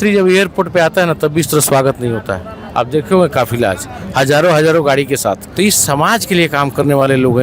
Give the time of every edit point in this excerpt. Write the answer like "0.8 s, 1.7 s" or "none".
5.5 s